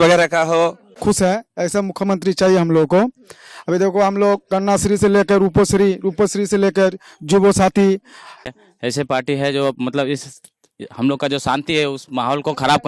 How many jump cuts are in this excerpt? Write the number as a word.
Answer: two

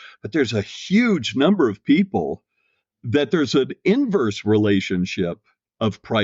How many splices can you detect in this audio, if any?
one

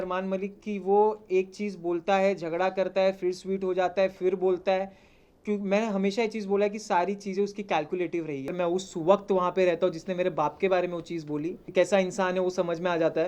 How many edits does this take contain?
two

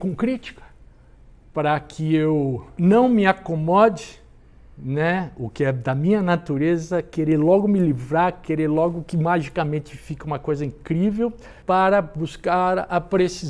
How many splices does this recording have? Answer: one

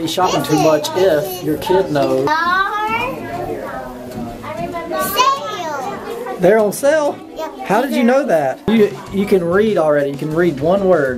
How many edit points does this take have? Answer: two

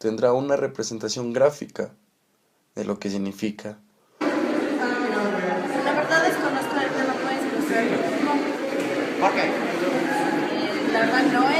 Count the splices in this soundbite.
zero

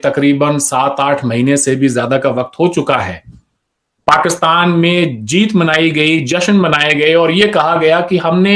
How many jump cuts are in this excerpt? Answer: zero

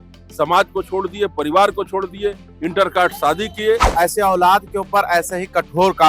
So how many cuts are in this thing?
one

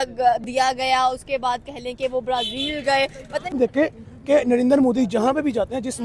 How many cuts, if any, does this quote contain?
one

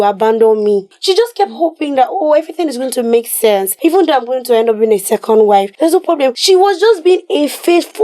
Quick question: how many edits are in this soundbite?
three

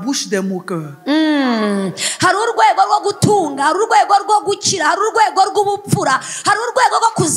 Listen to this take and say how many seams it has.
zero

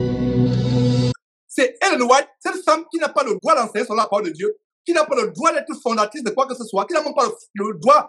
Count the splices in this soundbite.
one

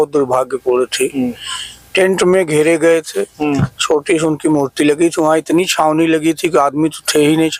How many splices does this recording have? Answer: zero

